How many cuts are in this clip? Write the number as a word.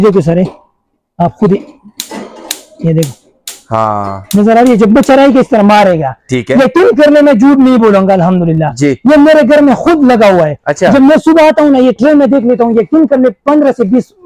zero